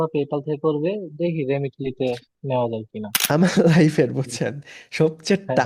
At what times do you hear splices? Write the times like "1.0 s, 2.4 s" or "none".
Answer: 3.1 s